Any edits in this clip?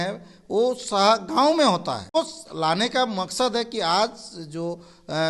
yes; 1 cut; at 2.1 s

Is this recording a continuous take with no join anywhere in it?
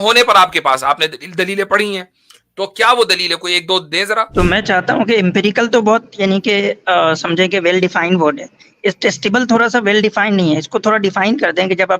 no; 1 cut; at 4.3 s

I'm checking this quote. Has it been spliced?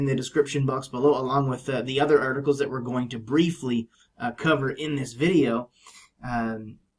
yes; 1 cut; at 2.8 s

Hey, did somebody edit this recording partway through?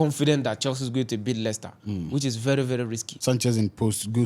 yes; 1 cut; at 3.0 s

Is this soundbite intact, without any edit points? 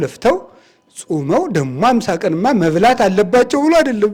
yes; 0 cuts

